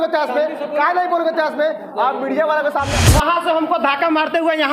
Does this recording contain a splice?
yes; 1 cut; at 2.9 s

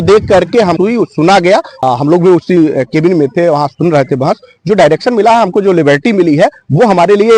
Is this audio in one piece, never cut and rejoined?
no; 1 cut; at 1.7 s

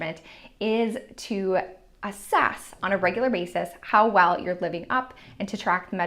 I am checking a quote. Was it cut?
no; 0 cuts

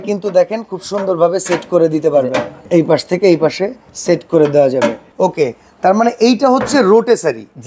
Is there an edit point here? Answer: no; 0 cuts

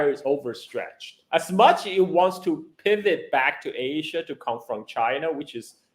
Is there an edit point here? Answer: yes; 1 cut; at 1.2 s

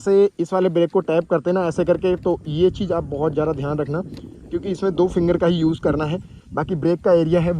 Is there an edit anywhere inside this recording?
no; 0 cuts

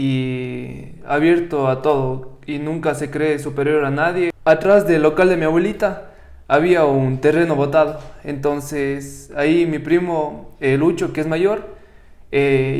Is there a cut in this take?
yes; 1 cut; at 4.4 s

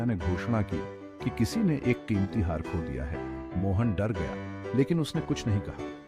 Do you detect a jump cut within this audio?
yes; 1 cut; at 4.8 s

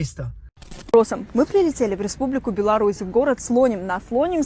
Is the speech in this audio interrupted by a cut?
yes; 1 cut; at 0.9 s

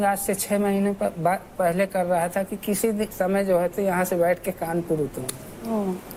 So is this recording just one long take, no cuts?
yes; 0 cuts

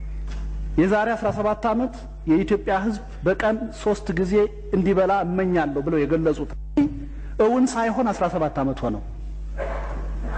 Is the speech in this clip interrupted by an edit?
no; 0 cuts

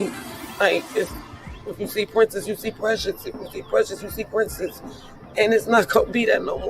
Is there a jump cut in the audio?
no; 0 cuts

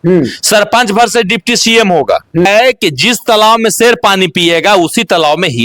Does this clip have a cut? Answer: yes; 1 cut; at 2.5 s

